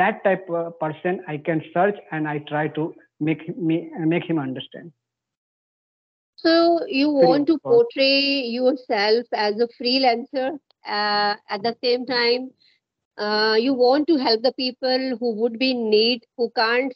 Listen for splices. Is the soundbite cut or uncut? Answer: uncut